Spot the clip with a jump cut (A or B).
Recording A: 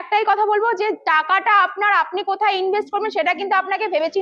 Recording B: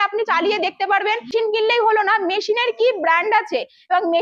B